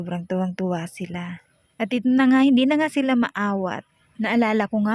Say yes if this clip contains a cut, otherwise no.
no